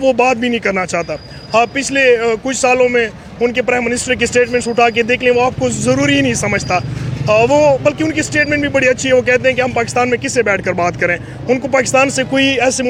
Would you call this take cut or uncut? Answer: uncut